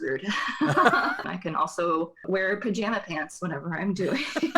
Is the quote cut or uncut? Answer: cut